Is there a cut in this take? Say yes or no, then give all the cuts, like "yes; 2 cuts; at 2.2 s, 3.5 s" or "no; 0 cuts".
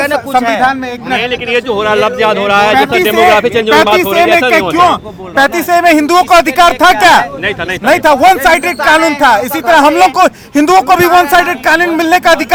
no; 0 cuts